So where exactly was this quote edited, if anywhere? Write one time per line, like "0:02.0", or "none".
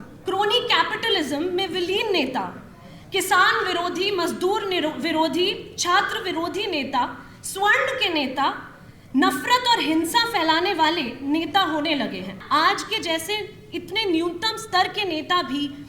0:12.4